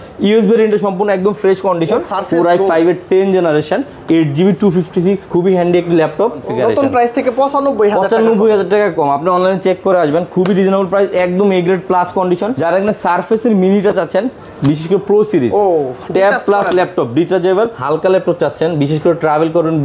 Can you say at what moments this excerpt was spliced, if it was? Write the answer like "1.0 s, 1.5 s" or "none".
2.1 s, 6.4 s, 12.5 s, 17.8 s